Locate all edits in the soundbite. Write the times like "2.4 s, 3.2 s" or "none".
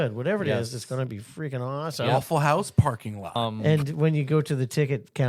3.4 s

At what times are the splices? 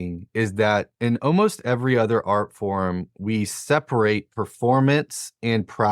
0.9 s

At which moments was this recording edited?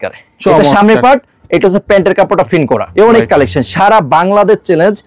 2.9 s

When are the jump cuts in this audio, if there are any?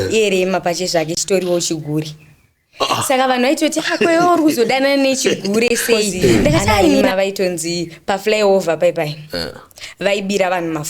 7.1 s

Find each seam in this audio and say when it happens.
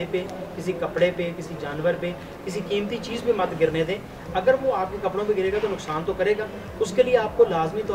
none

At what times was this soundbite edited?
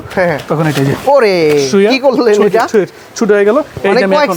none

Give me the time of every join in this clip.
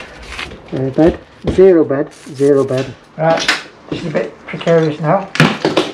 3.0 s

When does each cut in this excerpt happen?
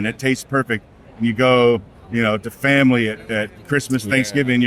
none

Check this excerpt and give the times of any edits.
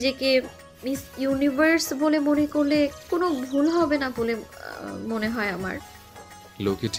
none

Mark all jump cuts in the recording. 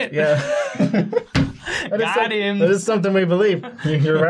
2.6 s

